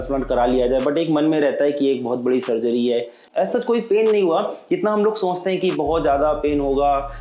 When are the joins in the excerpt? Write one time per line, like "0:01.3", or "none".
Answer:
0:03.2